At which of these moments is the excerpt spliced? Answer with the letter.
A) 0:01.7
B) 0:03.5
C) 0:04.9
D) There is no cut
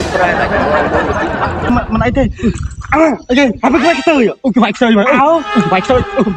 A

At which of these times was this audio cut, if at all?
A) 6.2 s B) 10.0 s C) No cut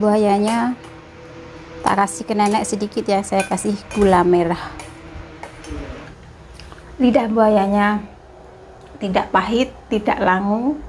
A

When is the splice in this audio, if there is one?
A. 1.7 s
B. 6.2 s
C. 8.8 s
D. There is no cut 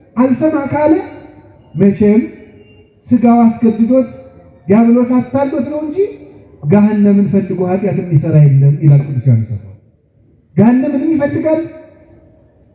D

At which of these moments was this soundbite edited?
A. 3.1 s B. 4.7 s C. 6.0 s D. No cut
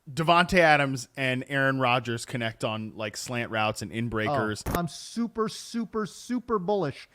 B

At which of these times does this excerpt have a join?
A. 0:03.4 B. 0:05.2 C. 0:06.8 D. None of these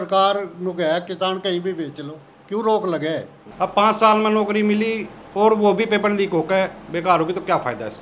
A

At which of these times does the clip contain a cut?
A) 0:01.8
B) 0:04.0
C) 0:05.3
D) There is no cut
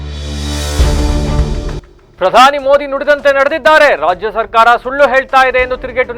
A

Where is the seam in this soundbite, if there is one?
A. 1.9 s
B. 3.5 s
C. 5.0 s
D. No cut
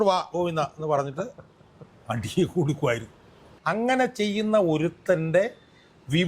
B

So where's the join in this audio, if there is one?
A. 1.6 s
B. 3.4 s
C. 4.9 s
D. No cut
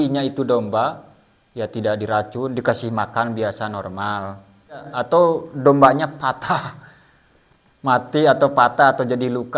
C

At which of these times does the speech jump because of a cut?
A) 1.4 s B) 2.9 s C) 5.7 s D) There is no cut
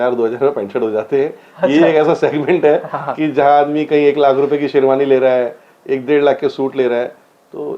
D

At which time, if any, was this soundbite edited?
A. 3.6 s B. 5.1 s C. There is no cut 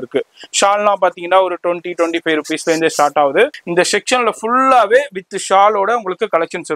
A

